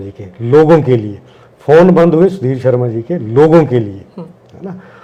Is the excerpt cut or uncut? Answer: uncut